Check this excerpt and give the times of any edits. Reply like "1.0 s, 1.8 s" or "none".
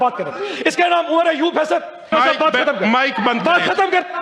2.1 s